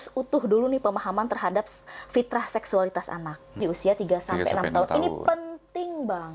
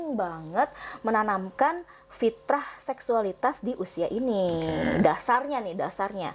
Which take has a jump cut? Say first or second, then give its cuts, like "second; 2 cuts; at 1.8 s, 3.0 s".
first; 1 cut; at 3.6 s